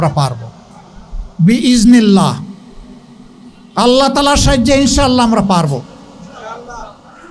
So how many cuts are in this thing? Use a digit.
0